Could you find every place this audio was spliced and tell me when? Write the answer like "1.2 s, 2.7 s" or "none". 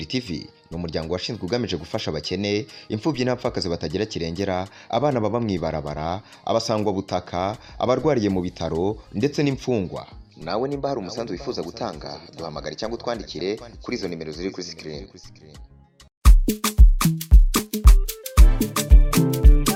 none